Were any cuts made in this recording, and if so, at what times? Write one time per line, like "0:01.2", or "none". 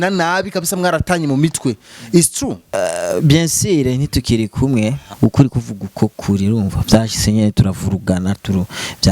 0:02.6
0:05.1